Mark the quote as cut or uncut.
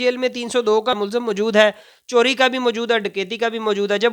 cut